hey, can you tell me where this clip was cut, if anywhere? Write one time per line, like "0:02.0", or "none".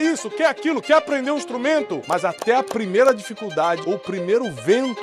0:02.0
0:03.8